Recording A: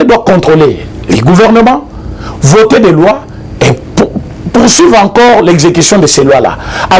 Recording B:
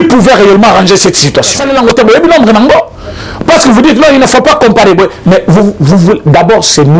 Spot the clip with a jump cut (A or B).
B